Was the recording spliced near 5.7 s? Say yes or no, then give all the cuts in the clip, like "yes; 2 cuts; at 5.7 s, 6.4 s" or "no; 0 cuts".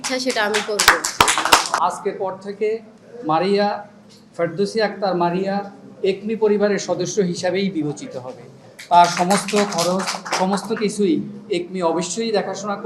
no; 1 cut; at 1.7 s